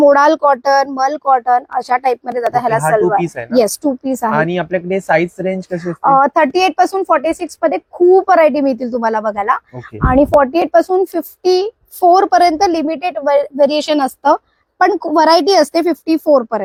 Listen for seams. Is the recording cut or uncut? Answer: uncut